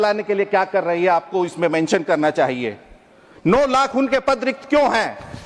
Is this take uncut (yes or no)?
yes